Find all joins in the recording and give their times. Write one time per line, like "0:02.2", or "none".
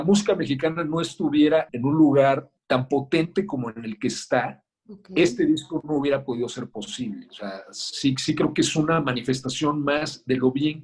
0:01.7
0:02.5

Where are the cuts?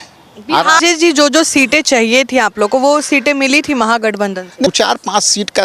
0:00.8
0:04.7

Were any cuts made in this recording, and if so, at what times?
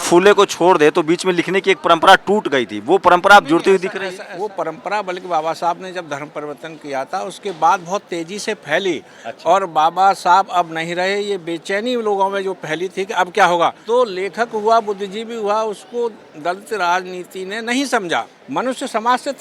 0:04.2
0:13.8
0:18.4

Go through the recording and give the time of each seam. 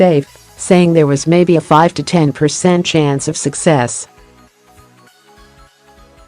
0:04.6

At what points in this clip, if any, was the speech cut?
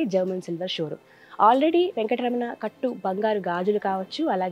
none

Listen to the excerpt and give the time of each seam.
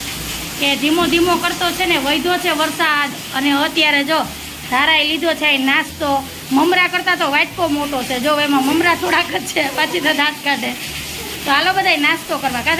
none

